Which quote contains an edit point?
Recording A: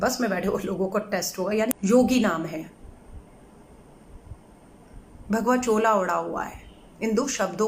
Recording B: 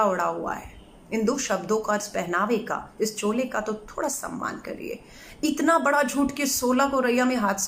A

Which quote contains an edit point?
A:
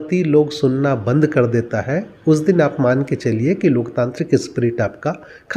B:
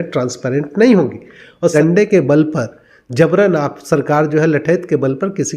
B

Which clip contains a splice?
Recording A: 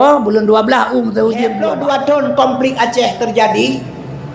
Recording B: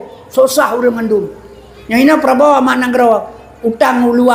A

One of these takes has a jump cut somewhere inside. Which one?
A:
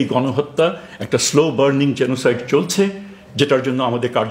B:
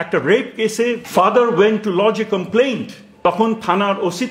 B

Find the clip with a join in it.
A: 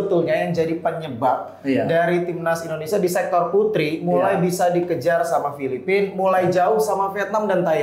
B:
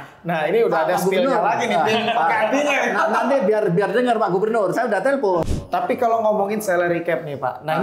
B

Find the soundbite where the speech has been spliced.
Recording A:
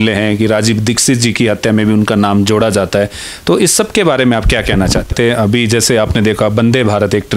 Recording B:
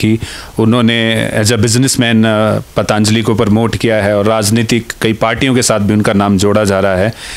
A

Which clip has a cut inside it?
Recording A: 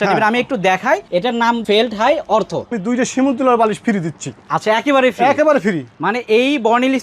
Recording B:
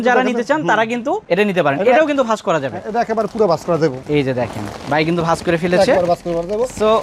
A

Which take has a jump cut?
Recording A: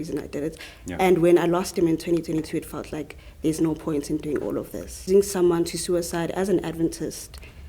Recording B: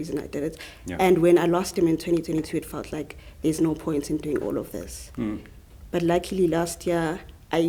A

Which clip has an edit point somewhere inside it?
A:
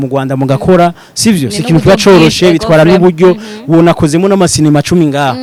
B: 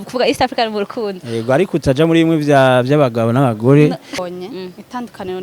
B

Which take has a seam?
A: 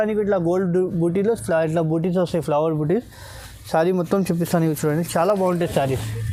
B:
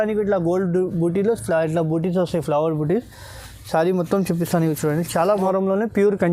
B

